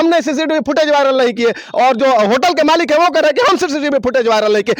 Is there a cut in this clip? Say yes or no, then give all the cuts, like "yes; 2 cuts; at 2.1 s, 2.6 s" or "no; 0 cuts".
no; 0 cuts